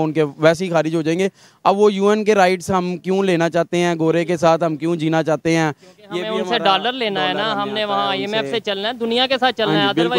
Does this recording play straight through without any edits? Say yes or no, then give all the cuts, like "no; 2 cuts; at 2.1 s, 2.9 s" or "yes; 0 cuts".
yes; 0 cuts